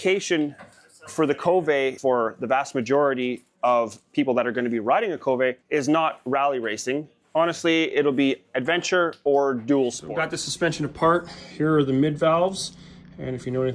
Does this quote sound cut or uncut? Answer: cut